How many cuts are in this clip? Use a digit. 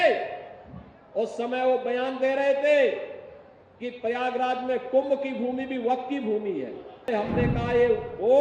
1